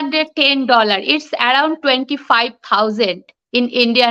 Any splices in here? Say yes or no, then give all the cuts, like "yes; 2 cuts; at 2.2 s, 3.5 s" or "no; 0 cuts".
no; 0 cuts